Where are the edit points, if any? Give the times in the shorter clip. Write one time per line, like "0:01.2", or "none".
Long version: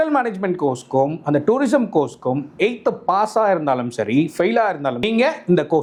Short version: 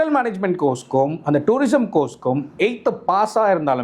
none